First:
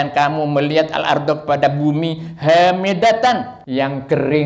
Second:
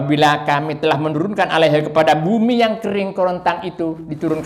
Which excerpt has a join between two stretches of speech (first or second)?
first